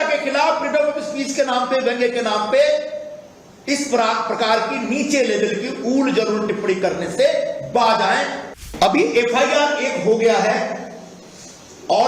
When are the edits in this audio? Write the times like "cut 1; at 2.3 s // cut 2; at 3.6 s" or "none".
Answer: cut 1; at 8.6 s